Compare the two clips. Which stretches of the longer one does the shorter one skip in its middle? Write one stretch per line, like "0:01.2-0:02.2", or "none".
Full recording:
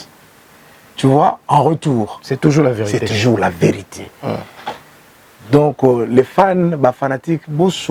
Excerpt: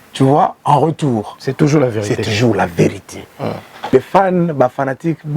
0:04.7-0:06.1